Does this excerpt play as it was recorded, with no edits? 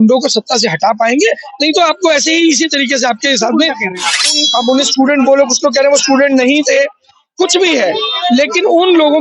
no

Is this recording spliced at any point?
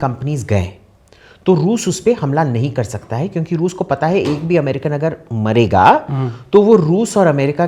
no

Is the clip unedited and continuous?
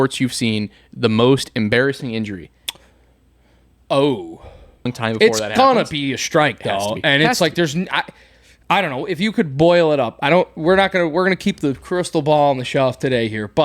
no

